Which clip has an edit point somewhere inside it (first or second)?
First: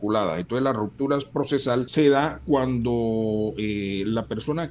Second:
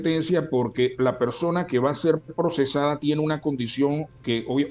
first